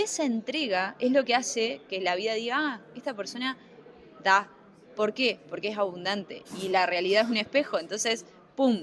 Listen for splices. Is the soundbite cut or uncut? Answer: uncut